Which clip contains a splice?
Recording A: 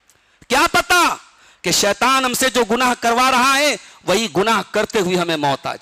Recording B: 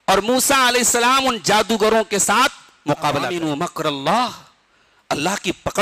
B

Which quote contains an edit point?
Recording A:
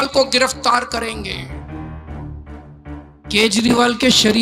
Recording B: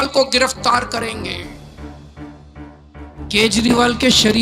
A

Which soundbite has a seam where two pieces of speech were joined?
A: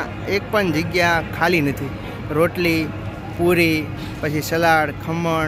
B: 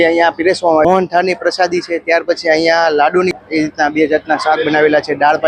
B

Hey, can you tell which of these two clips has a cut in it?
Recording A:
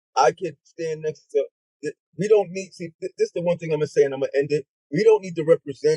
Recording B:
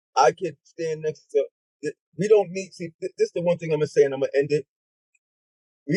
A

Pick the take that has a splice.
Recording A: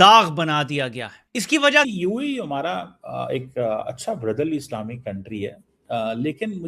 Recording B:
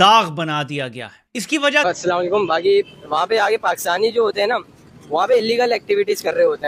A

